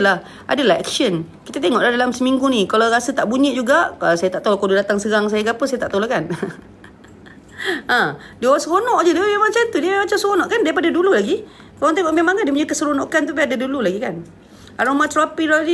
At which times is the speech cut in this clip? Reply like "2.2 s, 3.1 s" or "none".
none

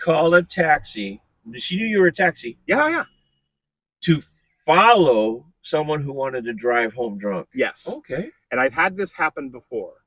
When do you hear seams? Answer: none

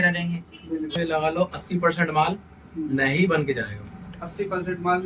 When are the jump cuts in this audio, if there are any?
1.0 s

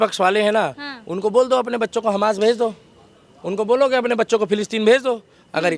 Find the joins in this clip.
none

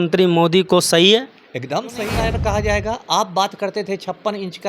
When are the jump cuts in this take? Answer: 2.2 s

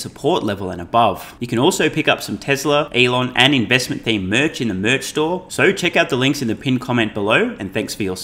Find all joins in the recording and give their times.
1.3 s, 2.9 s, 5.5 s

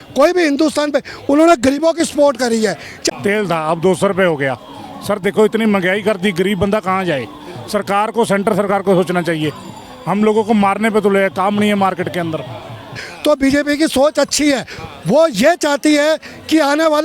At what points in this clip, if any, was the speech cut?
2.9 s, 13.0 s

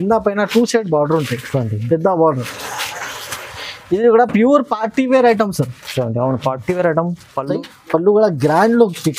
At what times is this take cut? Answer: 7.5 s

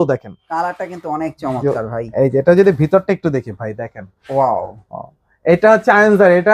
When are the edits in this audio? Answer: none

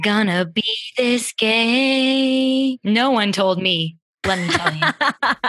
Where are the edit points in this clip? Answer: 4.4 s

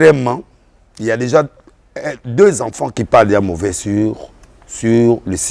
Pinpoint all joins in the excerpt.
2.9 s

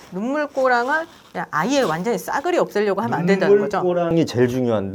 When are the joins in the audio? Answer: none

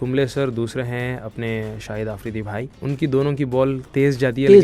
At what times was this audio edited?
2.7 s

